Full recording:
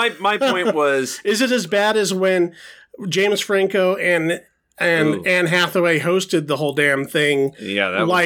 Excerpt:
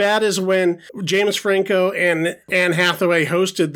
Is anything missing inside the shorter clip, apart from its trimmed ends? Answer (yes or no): yes